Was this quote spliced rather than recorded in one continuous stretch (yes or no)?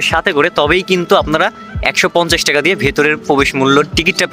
no